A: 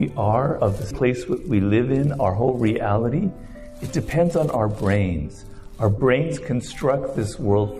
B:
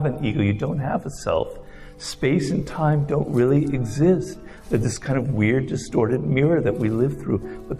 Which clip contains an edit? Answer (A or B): A